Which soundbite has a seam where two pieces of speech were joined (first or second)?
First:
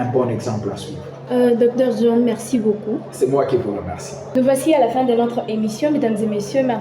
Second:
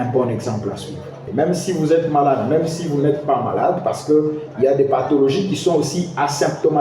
second